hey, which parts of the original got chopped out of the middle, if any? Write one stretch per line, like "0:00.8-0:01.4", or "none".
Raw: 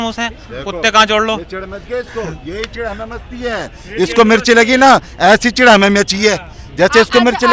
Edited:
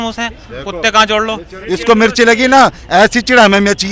0:01.5-0:03.8